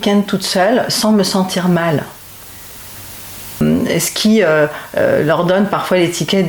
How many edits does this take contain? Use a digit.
1